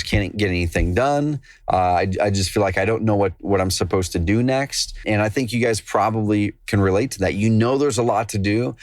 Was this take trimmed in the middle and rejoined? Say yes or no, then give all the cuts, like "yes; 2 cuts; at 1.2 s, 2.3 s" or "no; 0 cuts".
yes; 1 cut; at 5.0 s